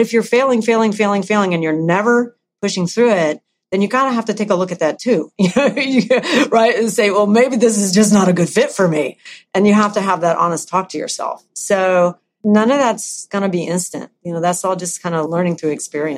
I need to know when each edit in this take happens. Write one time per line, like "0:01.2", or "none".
0:12.4
0:13.3
0:15.3